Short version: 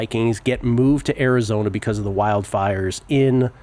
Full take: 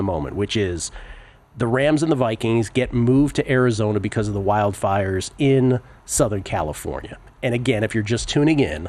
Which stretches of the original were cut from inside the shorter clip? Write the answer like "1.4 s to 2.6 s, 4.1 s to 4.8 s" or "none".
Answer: none